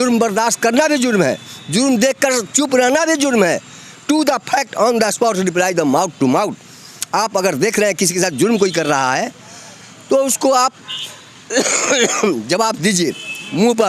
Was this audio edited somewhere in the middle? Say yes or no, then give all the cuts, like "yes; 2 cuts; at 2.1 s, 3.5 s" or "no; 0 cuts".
no; 0 cuts